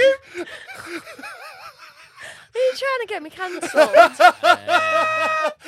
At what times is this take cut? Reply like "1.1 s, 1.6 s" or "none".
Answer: none